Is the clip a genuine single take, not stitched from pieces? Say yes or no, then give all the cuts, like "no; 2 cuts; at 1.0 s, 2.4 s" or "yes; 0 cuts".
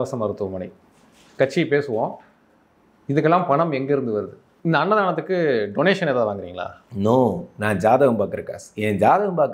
no; 1 cut; at 4.5 s